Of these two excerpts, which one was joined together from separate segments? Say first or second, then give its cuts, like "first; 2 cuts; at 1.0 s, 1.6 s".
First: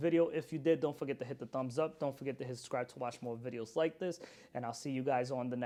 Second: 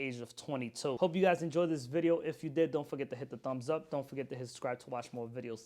second; 1 cut; at 1.0 s